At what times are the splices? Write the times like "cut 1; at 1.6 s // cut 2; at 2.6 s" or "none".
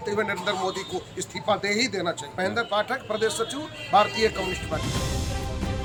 none

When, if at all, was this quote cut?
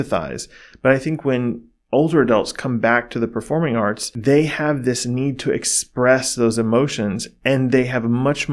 cut 1; at 4.1 s

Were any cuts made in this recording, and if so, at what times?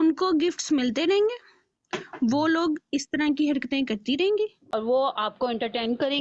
cut 1; at 4.6 s

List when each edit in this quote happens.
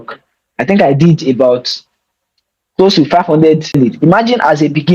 cut 1; at 3.8 s

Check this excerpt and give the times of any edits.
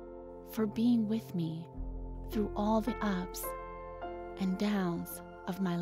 none

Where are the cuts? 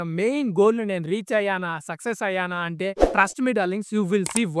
cut 1; at 3.1 s

